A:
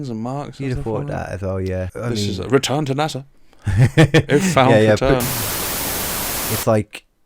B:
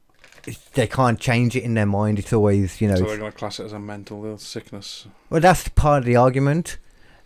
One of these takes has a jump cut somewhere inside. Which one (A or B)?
A